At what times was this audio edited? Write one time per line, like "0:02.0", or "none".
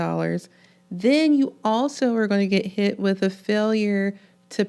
none